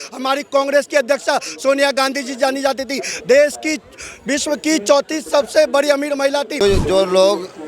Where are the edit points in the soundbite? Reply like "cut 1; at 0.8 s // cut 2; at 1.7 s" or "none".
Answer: cut 1; at 6.6 s